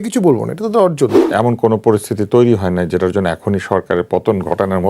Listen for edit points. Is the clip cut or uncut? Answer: cut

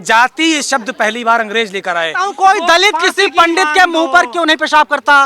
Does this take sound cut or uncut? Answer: cut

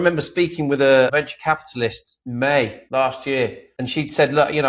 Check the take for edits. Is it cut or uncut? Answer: cut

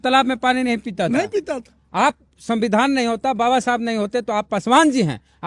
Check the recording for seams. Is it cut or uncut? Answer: uncut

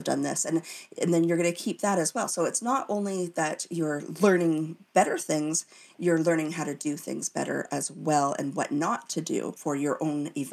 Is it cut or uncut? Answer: cut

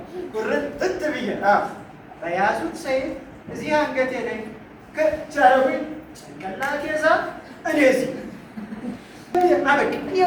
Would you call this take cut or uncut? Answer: uncut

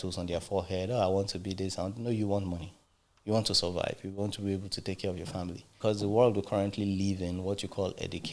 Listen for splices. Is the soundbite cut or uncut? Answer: cut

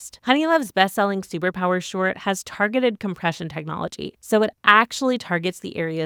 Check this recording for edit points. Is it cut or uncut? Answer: uncut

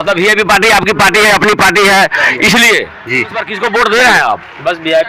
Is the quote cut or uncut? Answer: cut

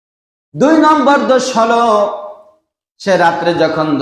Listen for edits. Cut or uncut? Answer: uncut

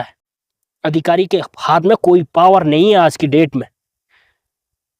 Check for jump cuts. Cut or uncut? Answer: uncut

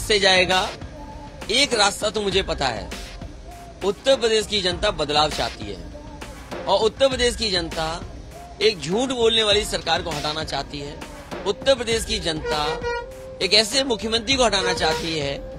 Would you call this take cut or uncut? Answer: uncut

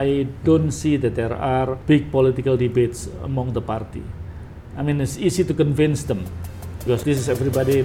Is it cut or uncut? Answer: uncut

